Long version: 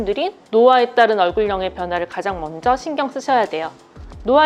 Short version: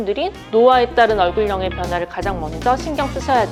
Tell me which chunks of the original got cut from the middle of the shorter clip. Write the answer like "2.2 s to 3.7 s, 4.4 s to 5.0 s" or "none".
none